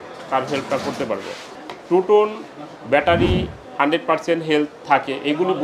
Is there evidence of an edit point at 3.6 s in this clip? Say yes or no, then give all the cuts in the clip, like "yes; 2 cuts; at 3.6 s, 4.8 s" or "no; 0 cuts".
no; 1 cut; at 1.5 s